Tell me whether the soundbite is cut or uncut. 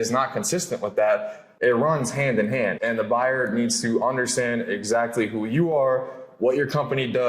cut